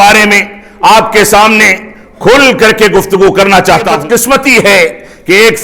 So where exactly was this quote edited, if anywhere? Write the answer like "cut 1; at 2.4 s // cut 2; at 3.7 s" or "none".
cut 1; at 3.9 s